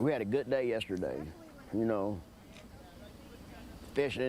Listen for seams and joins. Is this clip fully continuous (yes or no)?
no